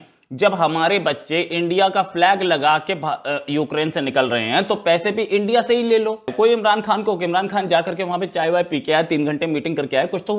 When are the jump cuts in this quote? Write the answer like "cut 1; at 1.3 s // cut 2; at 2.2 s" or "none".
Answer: cut 1; at 6.3 s